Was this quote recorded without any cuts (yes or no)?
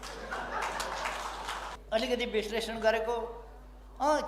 no